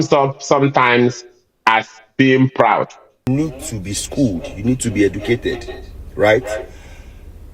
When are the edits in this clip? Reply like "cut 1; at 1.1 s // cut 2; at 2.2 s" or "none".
cut 1; at 3.3 s